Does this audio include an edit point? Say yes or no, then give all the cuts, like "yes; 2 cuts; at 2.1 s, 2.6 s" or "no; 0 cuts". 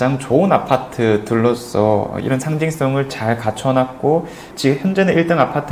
no; 0 cuts